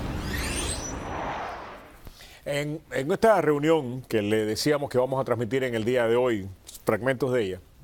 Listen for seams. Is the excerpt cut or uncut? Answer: uncut